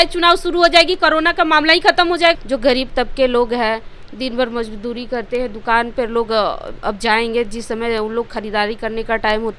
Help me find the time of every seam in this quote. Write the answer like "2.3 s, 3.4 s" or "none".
2.4 s